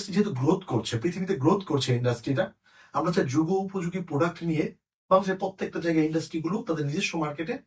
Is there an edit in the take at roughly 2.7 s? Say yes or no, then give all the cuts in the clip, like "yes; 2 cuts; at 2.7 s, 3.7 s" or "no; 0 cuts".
no; 0 cuts